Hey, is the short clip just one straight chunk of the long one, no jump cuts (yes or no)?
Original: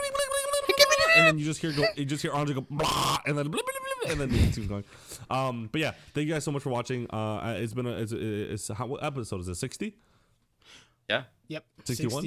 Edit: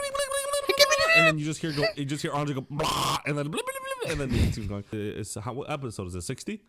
no